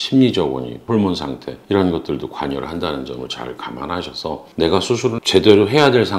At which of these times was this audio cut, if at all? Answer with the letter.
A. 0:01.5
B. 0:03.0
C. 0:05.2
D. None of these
C